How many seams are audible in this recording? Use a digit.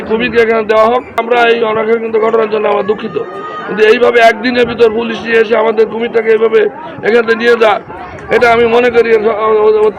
1